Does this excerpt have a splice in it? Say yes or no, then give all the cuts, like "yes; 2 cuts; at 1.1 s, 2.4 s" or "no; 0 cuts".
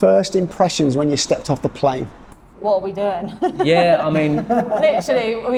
no; 0 cuts